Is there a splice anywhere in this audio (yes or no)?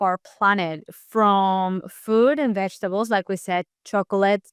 no